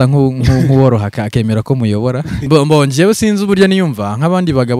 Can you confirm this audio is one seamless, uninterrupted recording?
no; 1 cut; at 2.5 s

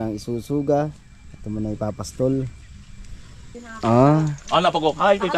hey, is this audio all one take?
no; 1 cut; at 3.6 s

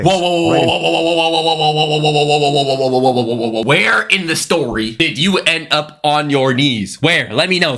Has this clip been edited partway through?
no; 0 cuts

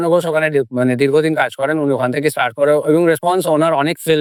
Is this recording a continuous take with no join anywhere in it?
yes; 0 cuts

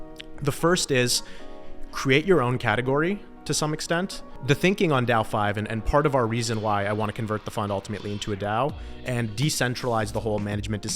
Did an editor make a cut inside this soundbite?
yes; 1 cut; at 4.3 s

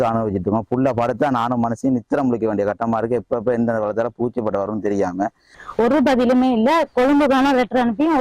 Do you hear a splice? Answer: yes; 1 cut; at 5.5 s

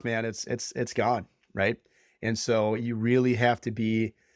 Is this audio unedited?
yes; 0 cuts

